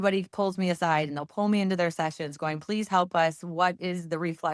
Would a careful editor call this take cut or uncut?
uncut